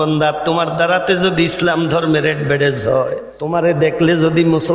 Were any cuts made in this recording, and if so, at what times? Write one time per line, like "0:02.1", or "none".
0:03.3